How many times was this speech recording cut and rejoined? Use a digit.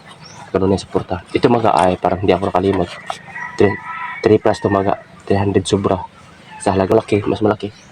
1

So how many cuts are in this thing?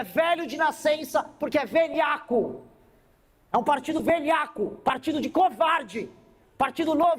0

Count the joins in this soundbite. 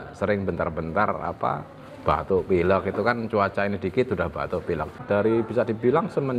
1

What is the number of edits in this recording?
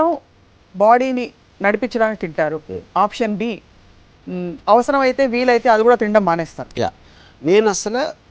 0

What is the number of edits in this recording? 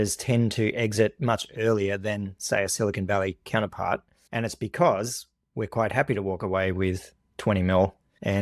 1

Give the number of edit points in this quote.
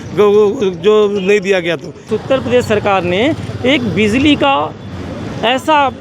1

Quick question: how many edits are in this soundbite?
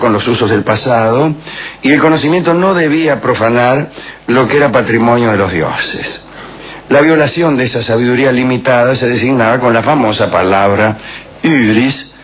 1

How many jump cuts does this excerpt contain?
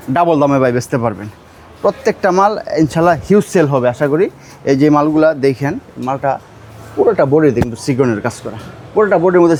0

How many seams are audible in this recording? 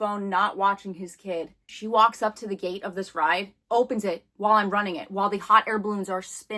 0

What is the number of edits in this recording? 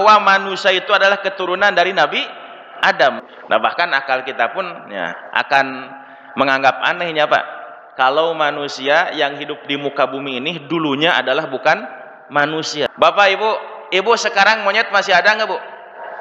2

